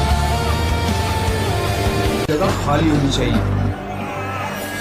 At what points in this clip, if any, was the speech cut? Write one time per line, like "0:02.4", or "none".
none